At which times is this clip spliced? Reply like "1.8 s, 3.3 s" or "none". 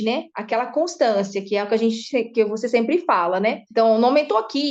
none

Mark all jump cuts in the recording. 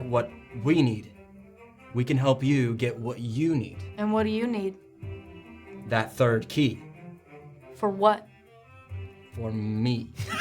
none

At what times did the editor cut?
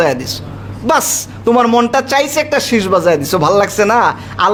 none

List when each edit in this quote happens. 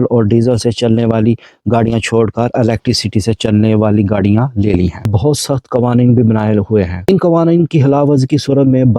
5.1 s

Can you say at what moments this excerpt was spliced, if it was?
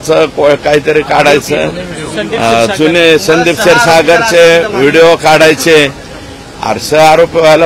none

